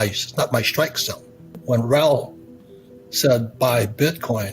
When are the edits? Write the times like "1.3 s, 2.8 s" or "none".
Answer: 1.5 s